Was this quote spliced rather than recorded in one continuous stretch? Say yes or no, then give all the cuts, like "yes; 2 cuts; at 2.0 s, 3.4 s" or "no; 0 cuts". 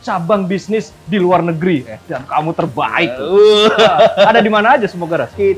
no; 0 cuts